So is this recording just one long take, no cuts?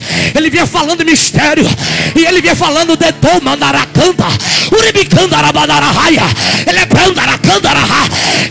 yes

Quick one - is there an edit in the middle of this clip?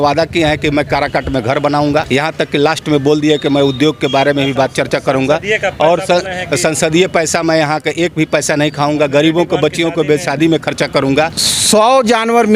yes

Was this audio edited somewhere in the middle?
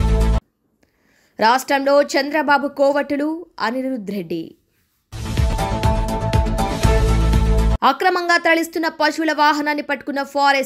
no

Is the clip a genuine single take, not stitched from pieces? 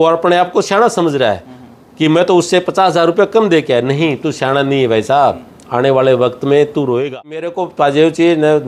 no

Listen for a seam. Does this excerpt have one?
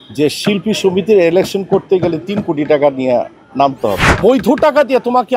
yes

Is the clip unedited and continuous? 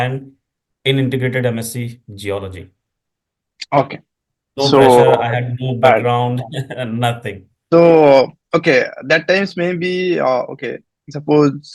yes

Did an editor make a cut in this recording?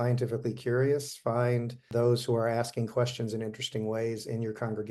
yes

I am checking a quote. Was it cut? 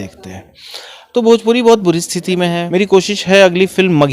yes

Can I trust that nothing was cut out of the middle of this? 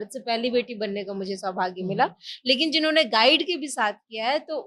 yes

